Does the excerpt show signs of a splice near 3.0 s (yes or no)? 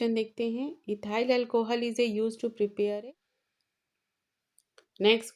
yes